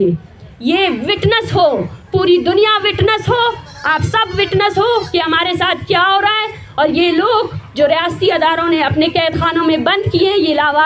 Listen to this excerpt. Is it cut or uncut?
uncut